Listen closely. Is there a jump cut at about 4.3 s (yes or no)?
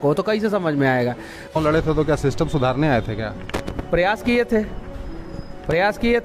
no